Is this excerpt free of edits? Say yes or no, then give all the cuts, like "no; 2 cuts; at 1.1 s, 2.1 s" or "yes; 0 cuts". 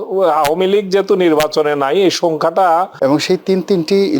no; 1 cut; at 2.9 s